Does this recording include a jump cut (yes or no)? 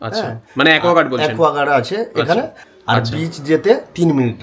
yes